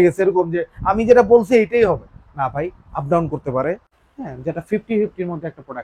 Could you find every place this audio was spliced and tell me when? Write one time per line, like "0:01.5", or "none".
0:04.0